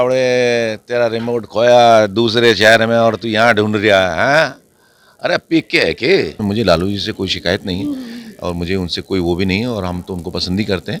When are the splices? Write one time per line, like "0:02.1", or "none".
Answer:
0:06.4